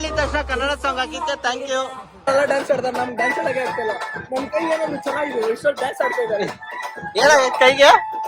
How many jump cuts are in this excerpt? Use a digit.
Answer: 1